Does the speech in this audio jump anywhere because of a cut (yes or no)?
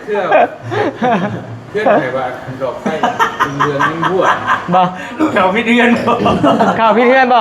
no